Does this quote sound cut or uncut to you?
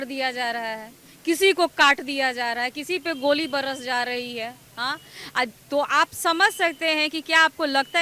uncut